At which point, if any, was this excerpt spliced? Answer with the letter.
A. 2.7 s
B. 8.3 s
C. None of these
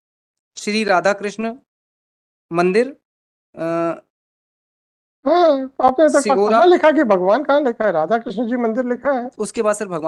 C